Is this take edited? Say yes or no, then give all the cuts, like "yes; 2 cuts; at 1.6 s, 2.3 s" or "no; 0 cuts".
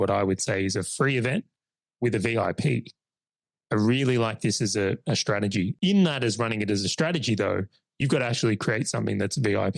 yes; 1 cut; at 5.7 s